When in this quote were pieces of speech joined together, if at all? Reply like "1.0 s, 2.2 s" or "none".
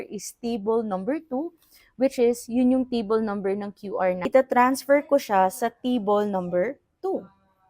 4.2 s